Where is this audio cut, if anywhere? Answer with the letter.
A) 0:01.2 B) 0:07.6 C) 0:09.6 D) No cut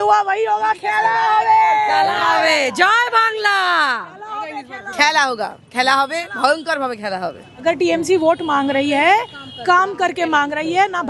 B